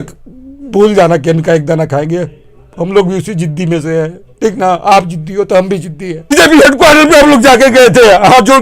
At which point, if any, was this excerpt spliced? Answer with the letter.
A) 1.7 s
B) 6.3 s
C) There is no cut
B